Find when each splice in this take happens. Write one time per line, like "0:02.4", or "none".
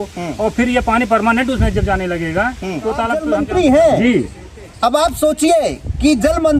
0:03.2